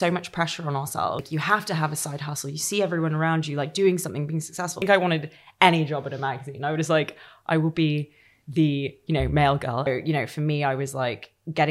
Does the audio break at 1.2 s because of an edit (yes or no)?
yes